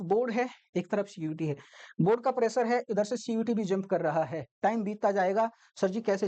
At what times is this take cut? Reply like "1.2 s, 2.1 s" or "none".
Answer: none